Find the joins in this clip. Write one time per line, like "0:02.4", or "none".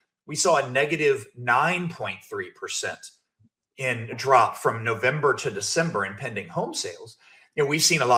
none

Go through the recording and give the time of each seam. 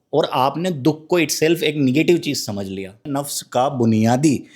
0:03.1

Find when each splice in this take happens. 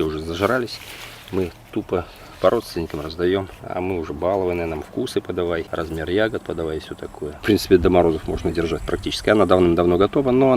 0:03.6
0:05.7
0:07.3

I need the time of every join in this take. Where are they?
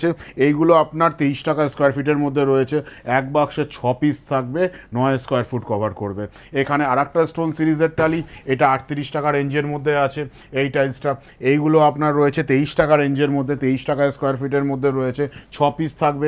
none

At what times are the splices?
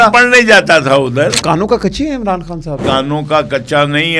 0:01.4
0:02.8

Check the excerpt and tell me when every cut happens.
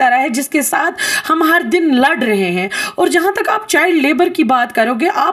none

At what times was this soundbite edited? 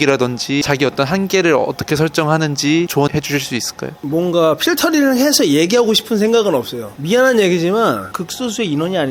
0:08.1

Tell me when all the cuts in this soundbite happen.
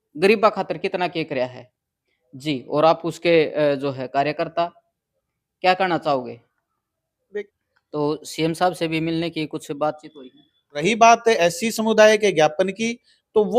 0:07.5
0:10.8

